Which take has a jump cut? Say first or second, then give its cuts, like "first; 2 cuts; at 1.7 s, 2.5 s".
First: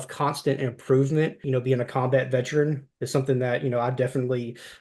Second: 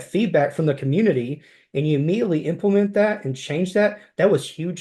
first; 1 cut; at 1.4 s